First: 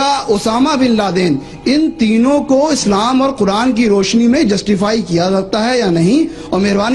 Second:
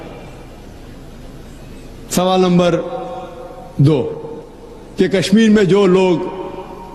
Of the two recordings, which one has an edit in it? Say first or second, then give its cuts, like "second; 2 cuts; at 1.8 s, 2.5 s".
second; 1 cut; at 1.6 s